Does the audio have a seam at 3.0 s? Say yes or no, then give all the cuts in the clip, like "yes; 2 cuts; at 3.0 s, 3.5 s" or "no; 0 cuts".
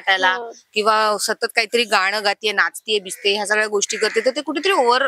no; 0 cuts